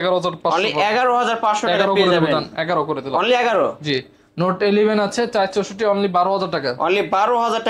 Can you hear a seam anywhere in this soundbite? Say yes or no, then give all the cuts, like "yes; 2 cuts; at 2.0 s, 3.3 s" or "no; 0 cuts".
no; 0 cuts